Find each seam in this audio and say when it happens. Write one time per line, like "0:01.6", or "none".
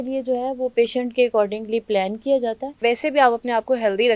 0:02.8